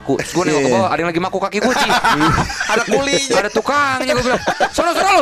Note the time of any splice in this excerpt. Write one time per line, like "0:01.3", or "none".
none